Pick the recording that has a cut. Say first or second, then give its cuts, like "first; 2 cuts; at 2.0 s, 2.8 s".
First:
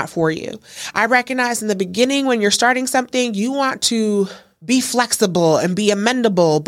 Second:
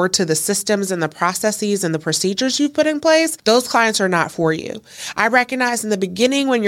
first; 1 cut; at 4.5 s